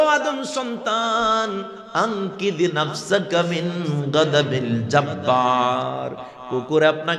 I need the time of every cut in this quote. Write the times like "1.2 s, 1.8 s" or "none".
none